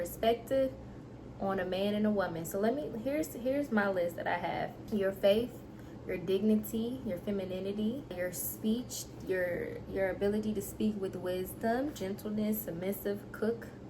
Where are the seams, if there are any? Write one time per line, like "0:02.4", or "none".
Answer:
0:04.8
0:08.2